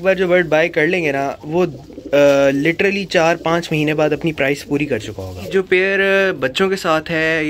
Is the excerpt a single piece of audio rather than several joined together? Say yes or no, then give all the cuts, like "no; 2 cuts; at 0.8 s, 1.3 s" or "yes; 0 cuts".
no; 1 cut; at 5.5 s